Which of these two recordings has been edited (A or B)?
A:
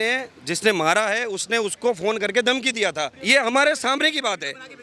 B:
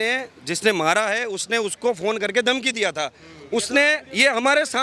A